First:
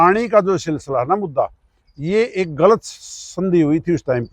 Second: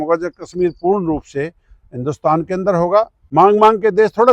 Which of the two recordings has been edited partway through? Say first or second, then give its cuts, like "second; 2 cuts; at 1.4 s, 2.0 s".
second; 1 cut; at 3.2 s